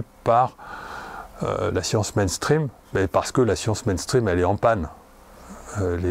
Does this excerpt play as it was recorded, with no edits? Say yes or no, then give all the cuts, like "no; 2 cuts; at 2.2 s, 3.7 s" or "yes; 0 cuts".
yes; 0 cuts